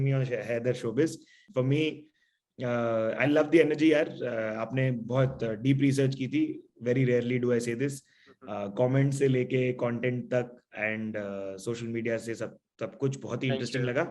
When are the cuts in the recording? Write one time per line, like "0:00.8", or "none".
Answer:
0:01.4